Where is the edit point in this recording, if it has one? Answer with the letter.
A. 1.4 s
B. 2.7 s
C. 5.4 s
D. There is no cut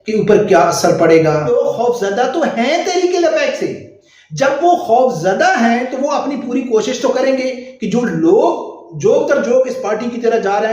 A